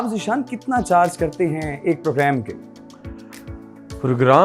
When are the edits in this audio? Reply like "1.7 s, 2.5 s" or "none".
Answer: none